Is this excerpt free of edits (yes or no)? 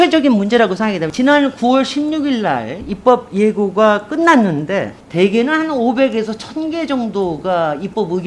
no